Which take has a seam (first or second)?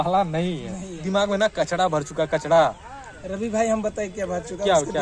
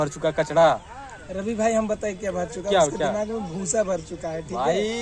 first